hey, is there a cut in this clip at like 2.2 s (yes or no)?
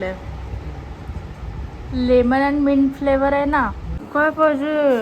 no